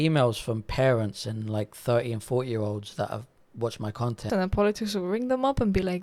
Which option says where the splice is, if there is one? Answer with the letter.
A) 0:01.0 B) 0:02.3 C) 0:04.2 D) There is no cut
C